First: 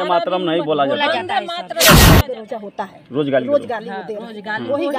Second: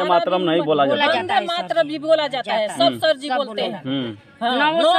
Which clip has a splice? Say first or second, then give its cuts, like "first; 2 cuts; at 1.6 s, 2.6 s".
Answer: first; 2 cuts; at 1.7 s, 2.2 s